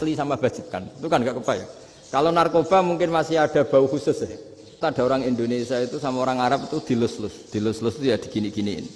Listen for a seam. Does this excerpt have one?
yes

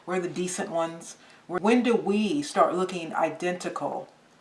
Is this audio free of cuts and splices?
no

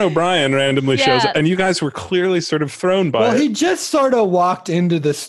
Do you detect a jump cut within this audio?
yes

